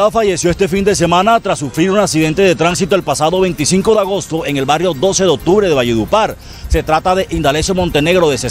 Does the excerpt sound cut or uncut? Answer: uncut